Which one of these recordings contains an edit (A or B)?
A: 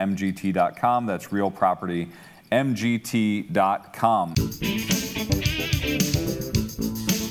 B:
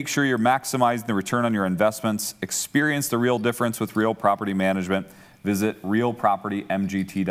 A